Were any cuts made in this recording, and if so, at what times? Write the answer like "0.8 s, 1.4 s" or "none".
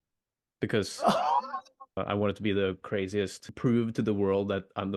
2.0 s, 3.4 s